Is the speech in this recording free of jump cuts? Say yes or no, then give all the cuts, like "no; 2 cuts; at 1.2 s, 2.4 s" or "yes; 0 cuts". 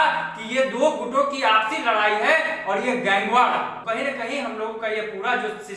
no; 1 cut; at 3.8 s